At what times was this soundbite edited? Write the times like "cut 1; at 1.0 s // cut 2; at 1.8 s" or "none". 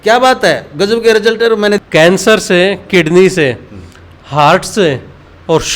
cut 1; at 2.2 s